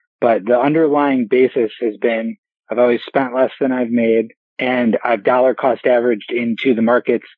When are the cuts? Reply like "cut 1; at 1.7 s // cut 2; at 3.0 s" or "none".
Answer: none